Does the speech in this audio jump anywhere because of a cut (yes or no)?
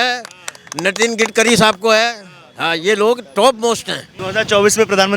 yes